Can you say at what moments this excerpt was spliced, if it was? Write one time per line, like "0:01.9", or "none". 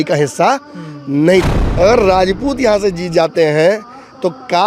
0:01.6